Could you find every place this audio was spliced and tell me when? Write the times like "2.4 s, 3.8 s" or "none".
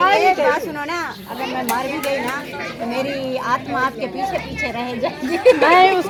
none

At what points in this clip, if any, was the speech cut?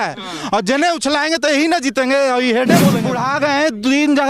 3.0 s

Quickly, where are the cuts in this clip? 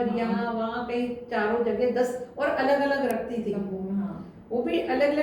none

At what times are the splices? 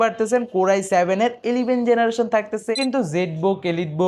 2.7 s

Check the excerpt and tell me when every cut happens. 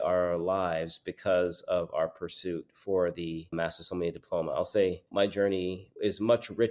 5.1 s

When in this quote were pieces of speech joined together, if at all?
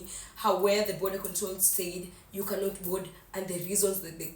none

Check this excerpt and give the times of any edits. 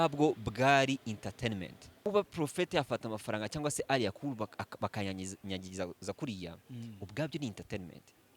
2.0 s

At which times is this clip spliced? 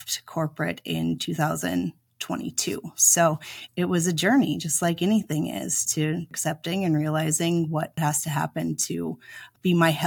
none

